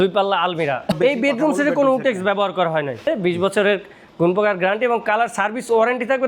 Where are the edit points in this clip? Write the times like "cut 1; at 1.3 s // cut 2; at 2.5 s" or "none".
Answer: cut 1; at 1.0 s // cut 2; at 3.1 s